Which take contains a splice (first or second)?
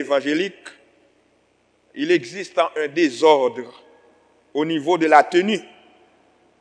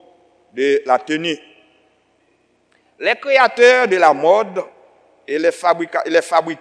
second